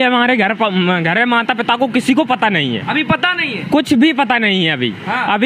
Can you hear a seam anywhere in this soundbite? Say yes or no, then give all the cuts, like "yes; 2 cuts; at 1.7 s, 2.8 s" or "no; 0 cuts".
no; 0 cuts